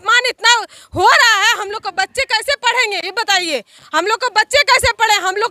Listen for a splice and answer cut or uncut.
uncut